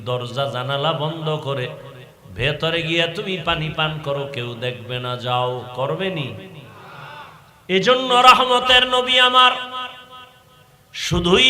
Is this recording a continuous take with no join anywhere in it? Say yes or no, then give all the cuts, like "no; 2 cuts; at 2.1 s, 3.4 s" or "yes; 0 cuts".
no; 1 cut; at 7.4 s